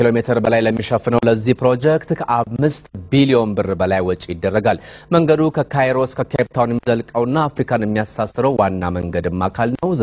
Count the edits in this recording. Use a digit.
1